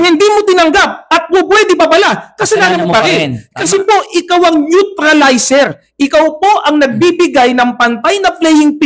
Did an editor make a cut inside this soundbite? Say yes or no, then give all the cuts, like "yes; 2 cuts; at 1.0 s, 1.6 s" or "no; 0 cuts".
no; 0 cuts